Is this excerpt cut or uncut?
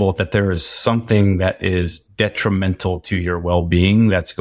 uncut